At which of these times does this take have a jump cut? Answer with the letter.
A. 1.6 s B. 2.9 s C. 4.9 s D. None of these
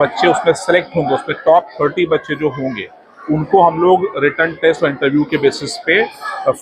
D